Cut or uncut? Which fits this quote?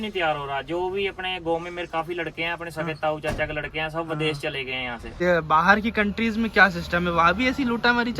cut